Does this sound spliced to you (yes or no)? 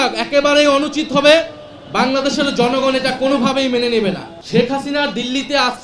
yes